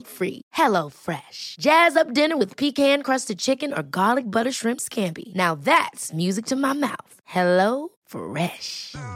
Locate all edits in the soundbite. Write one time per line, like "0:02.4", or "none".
none